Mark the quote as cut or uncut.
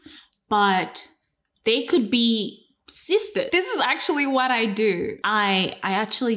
cut